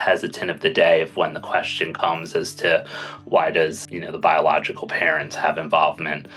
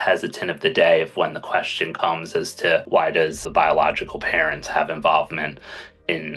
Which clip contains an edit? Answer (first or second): second